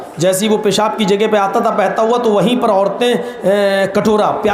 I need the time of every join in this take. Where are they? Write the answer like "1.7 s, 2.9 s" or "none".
none